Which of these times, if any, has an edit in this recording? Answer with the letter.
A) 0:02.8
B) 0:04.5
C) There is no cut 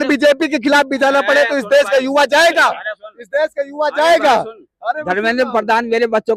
C